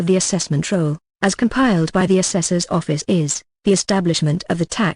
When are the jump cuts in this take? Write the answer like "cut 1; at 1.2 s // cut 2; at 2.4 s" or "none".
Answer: cut 1; at 3.6 s